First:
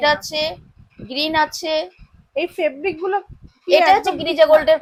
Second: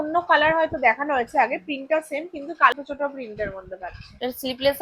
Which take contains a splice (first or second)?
second